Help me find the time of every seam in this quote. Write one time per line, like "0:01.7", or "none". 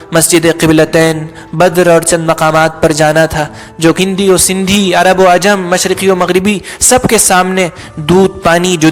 0:04.0